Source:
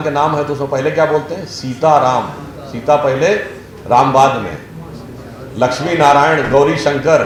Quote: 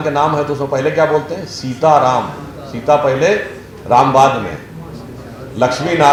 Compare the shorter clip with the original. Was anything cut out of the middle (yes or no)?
no